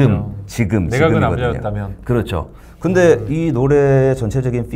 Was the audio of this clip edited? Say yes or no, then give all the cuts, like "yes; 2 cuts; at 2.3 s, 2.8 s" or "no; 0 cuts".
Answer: no; 0 cuts